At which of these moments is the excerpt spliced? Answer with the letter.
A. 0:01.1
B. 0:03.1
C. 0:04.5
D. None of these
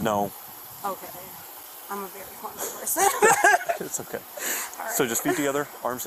D